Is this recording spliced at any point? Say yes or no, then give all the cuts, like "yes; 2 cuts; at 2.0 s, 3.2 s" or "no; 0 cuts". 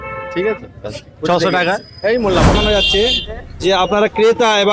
yes; 1 cut; at 2.6 s